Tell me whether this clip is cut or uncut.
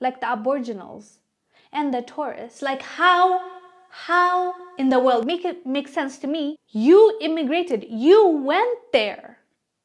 cut